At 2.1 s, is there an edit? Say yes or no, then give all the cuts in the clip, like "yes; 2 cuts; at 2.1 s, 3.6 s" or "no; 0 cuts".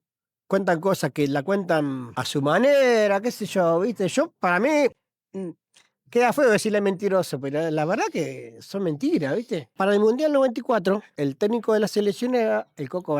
yes; 3 cuts; at 2.1 s, 9.7 s, 11.1 s